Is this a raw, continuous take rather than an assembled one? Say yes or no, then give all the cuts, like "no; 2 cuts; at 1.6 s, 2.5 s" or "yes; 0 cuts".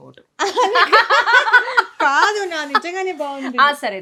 yes; 0 cuts